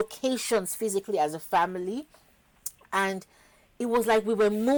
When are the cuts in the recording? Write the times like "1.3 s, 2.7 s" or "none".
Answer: none